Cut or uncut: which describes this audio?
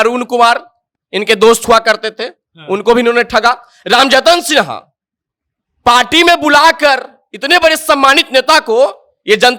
uncut